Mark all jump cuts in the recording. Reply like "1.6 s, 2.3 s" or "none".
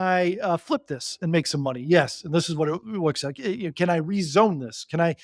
none